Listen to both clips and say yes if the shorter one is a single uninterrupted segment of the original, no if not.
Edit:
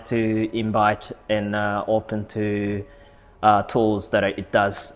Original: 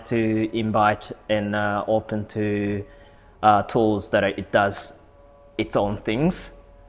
yes